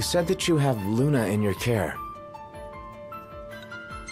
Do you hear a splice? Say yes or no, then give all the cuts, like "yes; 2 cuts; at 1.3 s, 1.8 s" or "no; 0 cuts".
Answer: yes; 1 cut; at 1.9 s